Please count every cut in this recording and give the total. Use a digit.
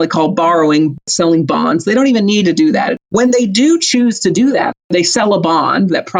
3